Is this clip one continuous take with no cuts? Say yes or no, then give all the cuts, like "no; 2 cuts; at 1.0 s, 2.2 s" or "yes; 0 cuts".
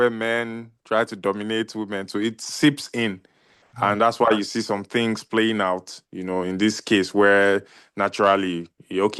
yes; 0 cuts